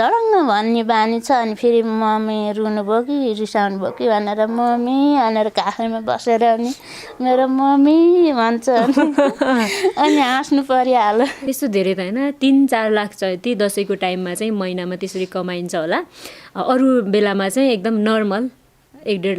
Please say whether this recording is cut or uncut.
cut